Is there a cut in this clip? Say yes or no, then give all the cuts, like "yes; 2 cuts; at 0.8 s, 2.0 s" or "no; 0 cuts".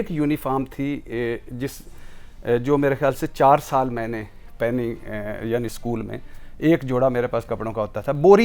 no; 0 cuts